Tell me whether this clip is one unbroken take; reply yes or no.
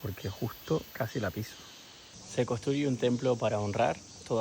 no